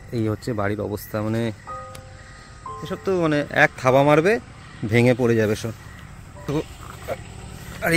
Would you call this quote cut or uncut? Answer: cut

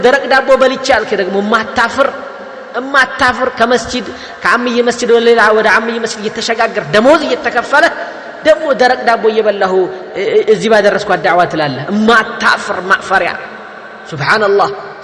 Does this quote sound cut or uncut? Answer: uncut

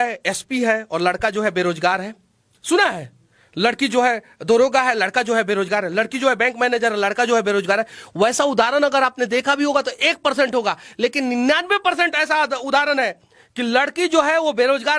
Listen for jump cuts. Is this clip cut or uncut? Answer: uncut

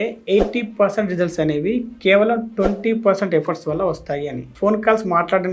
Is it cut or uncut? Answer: cut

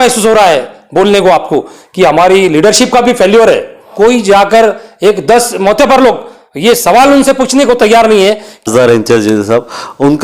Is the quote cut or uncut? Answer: cut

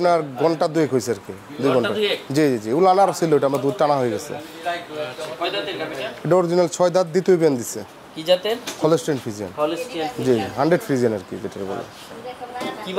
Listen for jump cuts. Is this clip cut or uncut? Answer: uncut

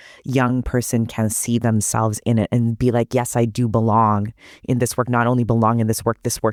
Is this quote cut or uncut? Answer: uncut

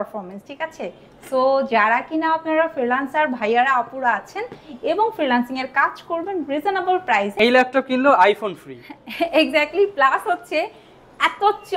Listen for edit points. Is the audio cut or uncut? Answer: cut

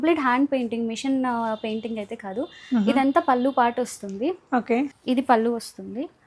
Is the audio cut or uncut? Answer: cut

